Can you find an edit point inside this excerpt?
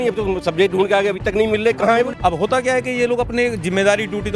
yes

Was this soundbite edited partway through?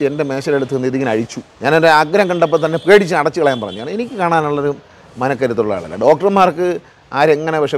yes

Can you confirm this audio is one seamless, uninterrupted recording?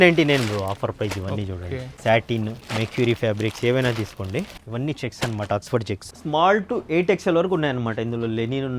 no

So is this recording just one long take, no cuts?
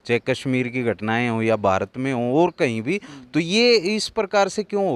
yes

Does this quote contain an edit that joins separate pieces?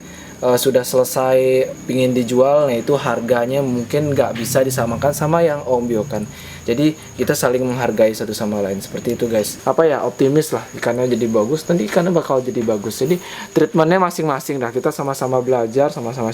yes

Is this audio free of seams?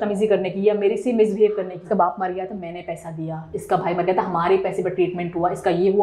no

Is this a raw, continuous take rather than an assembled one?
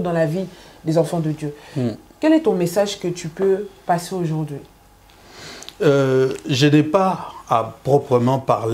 yes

